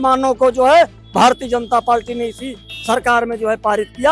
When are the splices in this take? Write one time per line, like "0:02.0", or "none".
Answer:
none